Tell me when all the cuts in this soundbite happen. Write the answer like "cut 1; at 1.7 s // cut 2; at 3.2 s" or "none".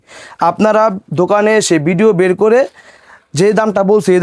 none